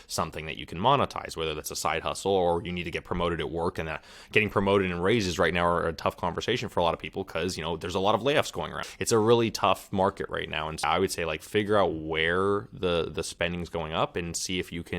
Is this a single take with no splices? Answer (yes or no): no